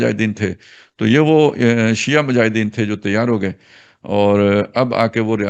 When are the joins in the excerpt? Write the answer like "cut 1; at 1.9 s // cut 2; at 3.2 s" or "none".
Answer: none